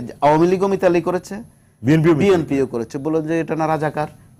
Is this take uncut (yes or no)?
yes